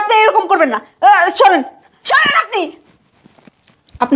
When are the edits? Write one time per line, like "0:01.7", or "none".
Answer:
0:02.8